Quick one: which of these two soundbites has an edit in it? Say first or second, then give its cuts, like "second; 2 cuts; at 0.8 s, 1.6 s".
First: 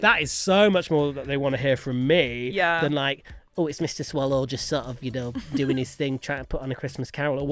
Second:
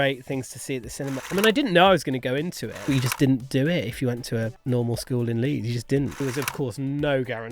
second; 4 cuts; at 1.2 s, 2.8 s, 4.4 s, 6.2 s